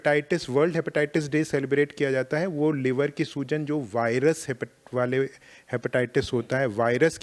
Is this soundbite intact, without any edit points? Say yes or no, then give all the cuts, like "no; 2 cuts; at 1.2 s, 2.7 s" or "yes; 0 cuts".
yes; 0 cuts